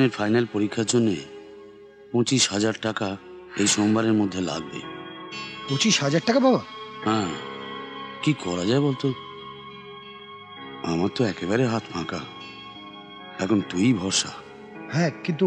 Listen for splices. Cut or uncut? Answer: uncut